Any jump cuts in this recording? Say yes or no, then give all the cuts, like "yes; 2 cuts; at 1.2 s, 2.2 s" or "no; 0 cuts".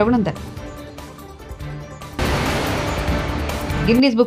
no; 0 cuts